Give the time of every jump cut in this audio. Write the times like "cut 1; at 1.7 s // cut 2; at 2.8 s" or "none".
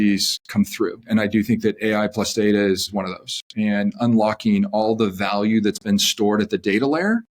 cut 1; at 1.0 s // cut 2; at 2.9 s